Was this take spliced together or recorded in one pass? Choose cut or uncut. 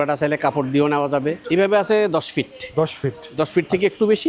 cut